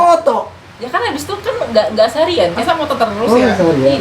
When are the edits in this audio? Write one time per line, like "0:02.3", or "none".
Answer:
none